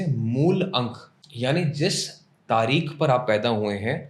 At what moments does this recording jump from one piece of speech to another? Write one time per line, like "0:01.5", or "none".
0:01.2